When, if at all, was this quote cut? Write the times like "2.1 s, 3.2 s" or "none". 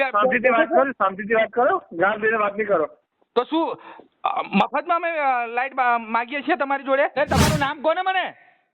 7.2 s